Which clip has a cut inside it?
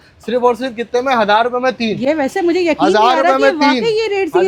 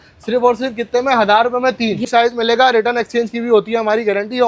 second; 1 cut; at 2.0 s

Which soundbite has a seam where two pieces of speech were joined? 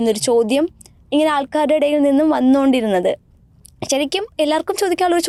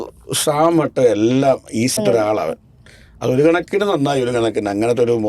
second; 1 cut; at 2.0 s

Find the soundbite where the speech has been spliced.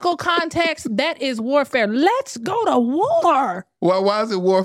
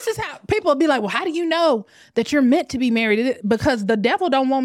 first; 1 cut; at 3.7 s

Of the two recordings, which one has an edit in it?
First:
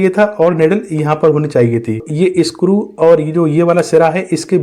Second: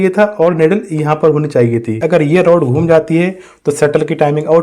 second; 1 cut; at 2.0 s

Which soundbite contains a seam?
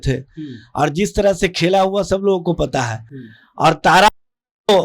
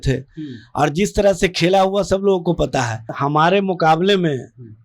second; 1 cut; at 3.2 s

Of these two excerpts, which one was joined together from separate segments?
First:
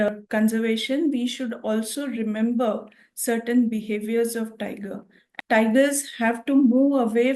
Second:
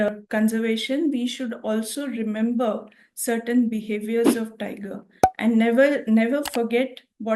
first; 1 cut; at 5.1 s

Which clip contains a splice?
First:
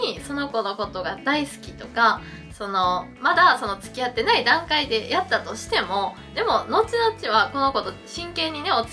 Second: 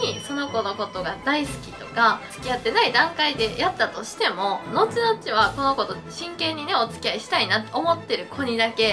second; 2 cuts; at 2.3 s, 4.7 s

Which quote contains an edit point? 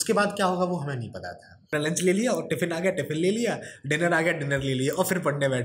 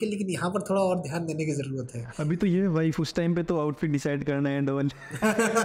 first; 1 cut; at 1.5 s

